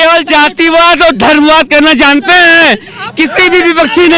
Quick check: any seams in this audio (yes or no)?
no